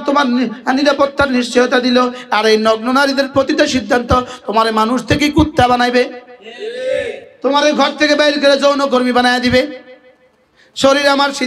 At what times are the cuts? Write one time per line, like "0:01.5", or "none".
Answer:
0:07.3